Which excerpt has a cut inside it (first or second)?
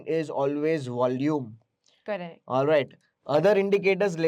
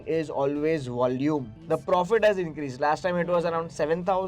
second